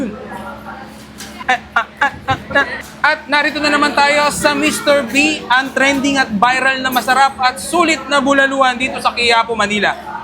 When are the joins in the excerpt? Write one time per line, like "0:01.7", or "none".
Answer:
0:01.4